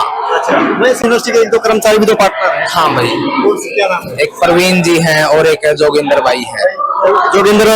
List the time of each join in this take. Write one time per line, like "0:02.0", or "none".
0:01.0